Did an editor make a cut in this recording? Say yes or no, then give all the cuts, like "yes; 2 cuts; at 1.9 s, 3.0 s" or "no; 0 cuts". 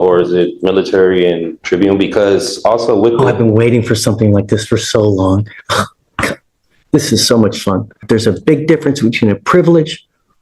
yes; 2 cuts; at 1.5 s, 8.0 s